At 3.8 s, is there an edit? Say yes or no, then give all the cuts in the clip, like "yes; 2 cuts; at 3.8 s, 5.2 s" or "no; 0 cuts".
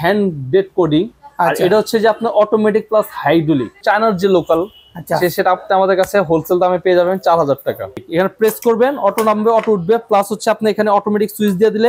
yes; 2 cuts; at 3.8 s, 8.0 s